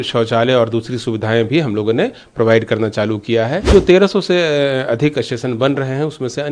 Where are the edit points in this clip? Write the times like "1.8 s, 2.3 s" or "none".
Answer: 3.7 s